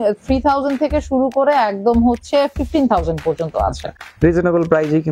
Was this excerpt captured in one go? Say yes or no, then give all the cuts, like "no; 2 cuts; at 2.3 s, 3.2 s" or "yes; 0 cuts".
yes; 0 cuts